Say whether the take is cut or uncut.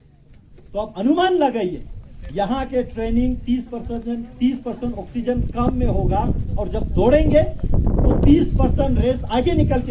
uncut